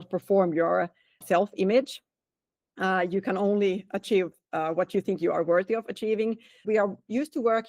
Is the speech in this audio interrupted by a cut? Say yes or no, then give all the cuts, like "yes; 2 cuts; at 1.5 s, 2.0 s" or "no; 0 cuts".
yes; 2 cuts; at 1.2 s, 6.6 s